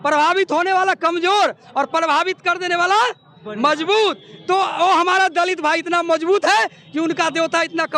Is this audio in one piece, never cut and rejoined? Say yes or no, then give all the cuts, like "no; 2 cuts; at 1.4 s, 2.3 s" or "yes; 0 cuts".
yes; 0 cuts